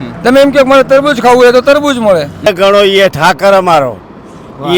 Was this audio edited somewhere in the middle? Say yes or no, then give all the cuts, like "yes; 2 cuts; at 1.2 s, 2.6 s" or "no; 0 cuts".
yes; 1 cut; at 2.5 s